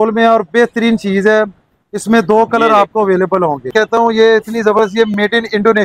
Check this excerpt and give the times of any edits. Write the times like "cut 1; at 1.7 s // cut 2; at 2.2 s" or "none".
cut 1; at 3.7 s